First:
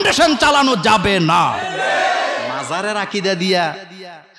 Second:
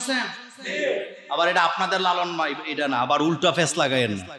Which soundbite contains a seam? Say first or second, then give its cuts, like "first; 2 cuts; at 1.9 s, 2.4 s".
first; 1 cut; at 2.6 s